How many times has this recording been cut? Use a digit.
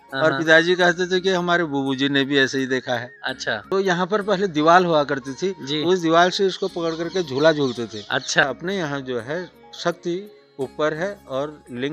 2